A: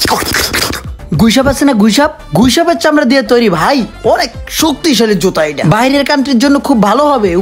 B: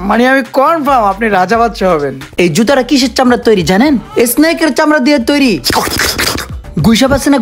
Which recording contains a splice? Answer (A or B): B